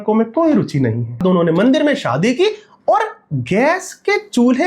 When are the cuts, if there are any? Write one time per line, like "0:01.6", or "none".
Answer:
0:01.2